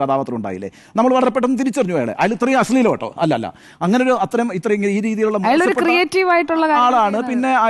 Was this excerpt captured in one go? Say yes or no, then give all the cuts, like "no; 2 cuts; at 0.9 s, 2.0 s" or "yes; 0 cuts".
yes; 0 cuts